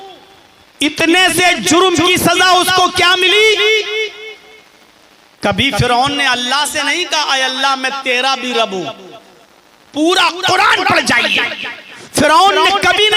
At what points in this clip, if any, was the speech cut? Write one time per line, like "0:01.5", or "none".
none